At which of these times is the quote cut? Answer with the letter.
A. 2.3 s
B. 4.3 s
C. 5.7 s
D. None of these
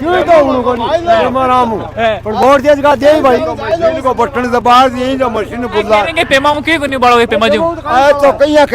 D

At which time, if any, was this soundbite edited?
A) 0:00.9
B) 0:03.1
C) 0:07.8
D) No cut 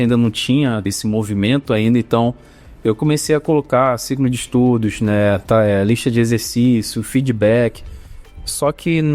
A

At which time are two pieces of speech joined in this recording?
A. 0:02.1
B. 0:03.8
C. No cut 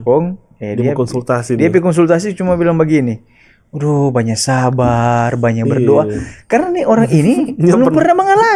C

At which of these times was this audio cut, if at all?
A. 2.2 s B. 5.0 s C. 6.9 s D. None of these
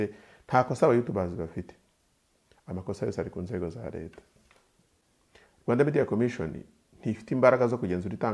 B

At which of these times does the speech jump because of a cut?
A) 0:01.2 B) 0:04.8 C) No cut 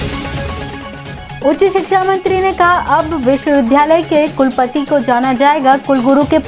A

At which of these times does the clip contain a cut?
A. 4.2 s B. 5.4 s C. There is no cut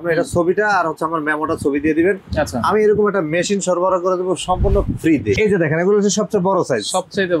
B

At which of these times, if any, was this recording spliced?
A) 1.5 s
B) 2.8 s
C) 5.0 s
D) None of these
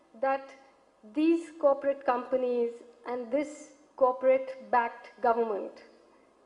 D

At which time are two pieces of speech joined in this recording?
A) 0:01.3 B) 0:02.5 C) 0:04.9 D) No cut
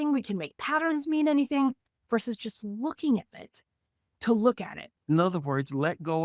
C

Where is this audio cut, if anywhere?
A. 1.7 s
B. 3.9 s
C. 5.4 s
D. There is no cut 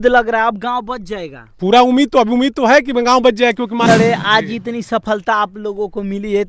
B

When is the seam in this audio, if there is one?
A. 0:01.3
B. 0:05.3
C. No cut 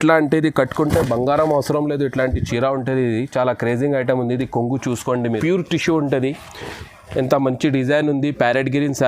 B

